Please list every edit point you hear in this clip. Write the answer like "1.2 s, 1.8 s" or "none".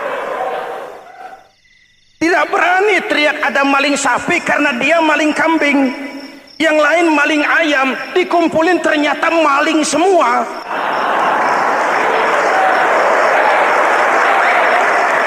10.6 s